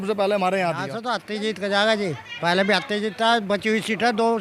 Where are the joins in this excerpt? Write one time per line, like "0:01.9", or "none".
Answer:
0:00.9